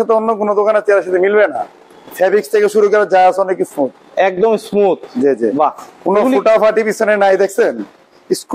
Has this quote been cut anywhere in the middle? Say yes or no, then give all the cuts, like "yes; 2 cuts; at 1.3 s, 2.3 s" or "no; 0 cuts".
no; 0 cuts